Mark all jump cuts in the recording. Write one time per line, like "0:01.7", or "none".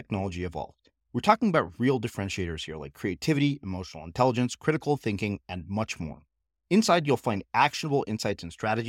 none

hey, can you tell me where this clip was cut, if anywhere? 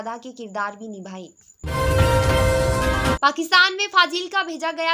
0:01.3
0:03.2

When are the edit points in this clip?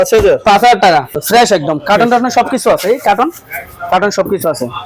0:01.1

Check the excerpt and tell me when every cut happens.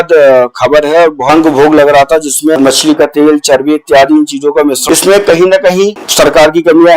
0:01.3
0:02.6
0:04.8
0:06.0

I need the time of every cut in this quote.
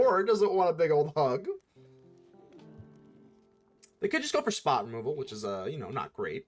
none

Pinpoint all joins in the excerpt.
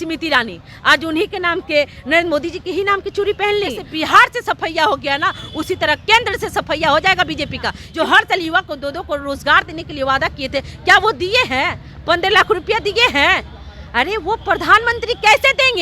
0:03.9
0:07.8

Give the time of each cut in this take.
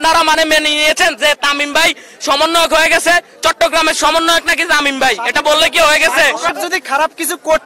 0:06.5

